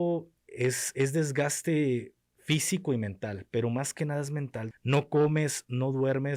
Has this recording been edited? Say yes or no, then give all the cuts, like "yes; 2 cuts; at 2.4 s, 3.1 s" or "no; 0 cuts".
yes; 1 cut; at 4.6 s